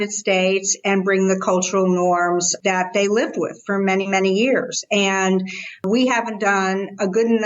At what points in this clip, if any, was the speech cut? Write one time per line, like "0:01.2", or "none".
0:02.5
0:05.8